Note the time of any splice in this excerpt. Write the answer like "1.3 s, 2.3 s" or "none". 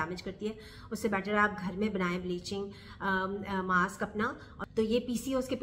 4.6 s